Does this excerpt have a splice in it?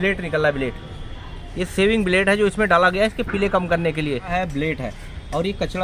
yes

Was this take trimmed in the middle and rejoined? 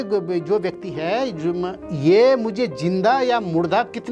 no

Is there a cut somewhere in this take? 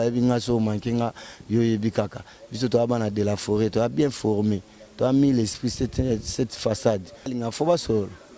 yes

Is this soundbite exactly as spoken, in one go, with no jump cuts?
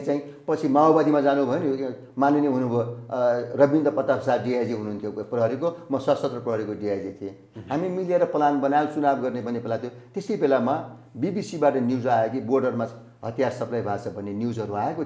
yes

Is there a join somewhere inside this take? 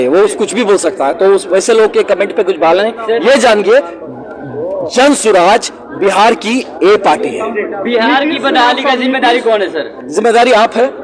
no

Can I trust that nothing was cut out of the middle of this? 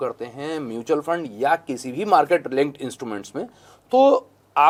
yes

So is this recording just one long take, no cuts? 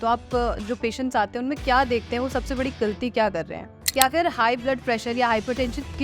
no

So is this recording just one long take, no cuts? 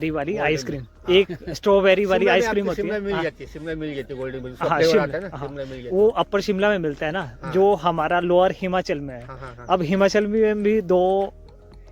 yes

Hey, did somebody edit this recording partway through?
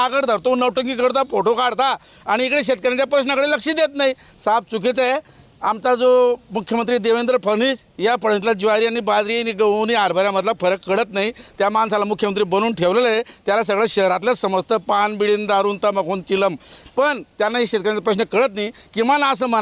no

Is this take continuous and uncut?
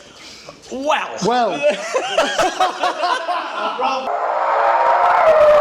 no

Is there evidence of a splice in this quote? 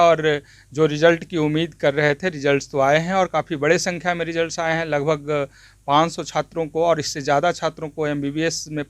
no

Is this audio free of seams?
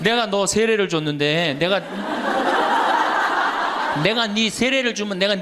yes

